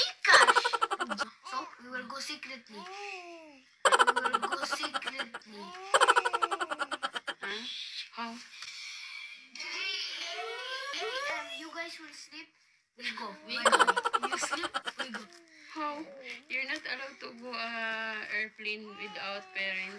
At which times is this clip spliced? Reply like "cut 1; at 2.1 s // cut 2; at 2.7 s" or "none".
cut 1; at 1.3 s // cut 2; at 3.8 s // cut 3; at 5.2 s